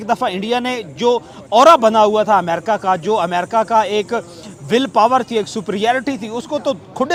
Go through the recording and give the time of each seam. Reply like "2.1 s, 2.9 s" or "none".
none